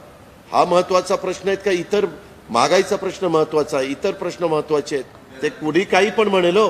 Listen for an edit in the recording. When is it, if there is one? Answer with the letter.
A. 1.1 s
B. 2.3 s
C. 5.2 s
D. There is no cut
C